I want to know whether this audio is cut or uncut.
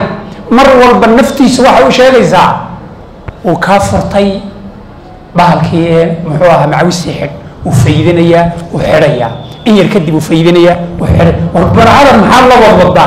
uncut